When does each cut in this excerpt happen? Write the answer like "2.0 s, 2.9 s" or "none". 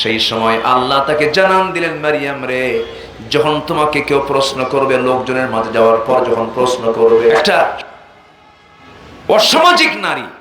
7.5 s

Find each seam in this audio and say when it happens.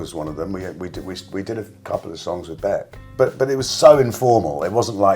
3.0 s

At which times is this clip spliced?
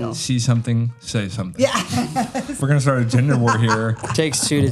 2.6 s

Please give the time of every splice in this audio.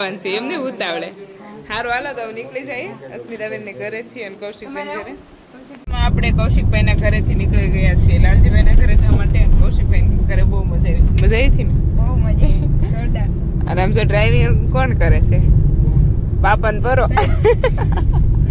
none

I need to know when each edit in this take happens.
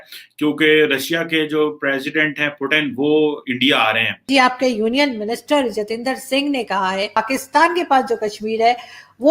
4.1 s, 7.2 s

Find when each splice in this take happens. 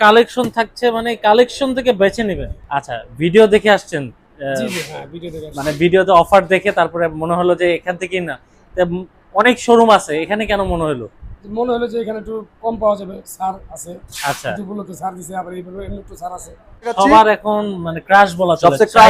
2.5 s, 17.0 s

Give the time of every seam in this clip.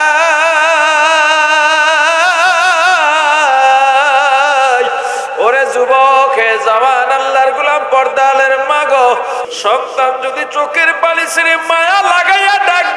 9.5 s

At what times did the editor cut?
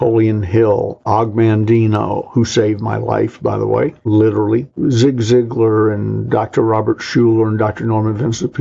1.0 s, 4.0 s, 4.7 s

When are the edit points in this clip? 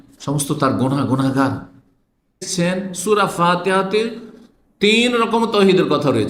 2.5 s

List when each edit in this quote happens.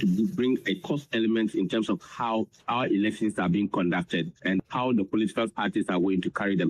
2.6 s, 4.6 s

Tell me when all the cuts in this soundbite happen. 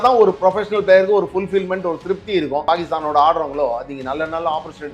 2.6 s

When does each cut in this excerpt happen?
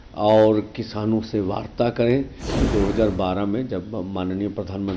2.6 s

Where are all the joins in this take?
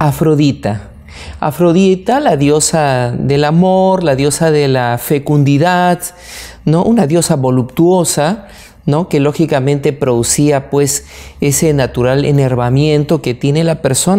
none

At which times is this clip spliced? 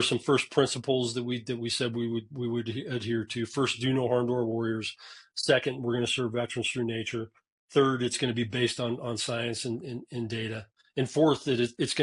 none

